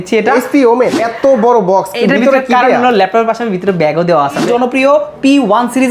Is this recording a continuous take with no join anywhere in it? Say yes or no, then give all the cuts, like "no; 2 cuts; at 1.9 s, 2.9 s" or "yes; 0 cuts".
no; 2 cuts; at 1.0 s, 4.5 s